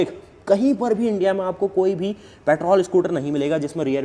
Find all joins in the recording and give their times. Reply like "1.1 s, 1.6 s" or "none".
none

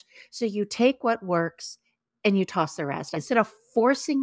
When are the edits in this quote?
3.2 s

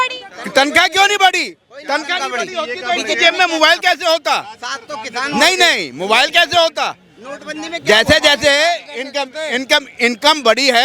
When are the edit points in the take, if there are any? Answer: none

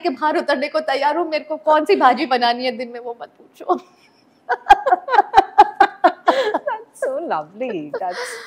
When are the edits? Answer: none

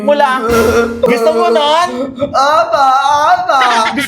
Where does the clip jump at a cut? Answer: 1.1 s

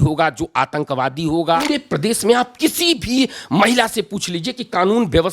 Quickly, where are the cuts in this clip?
1.6 s

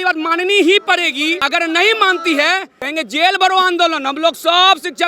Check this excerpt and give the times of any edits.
1.4 s, 2.8 s

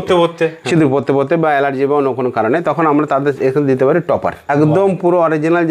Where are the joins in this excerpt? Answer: 4.5 s

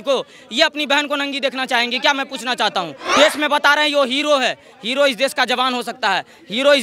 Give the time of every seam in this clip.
3.0 s

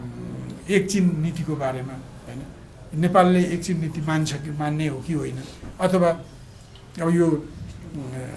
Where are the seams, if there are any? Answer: none

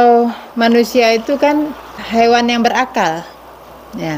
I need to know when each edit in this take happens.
2.0 s

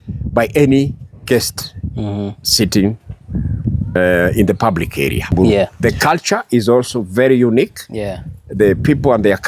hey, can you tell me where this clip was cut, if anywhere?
5.7 s

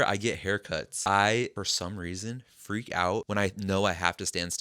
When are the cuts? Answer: 0.9 s, 1.5 s, 3.3 s

